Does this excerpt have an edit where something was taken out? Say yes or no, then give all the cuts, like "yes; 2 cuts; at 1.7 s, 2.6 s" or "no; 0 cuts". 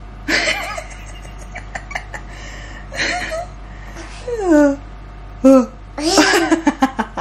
no; 0 cuts